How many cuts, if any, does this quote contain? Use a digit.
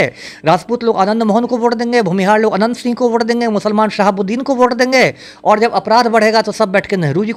0